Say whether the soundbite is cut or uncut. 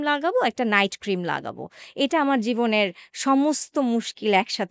uncut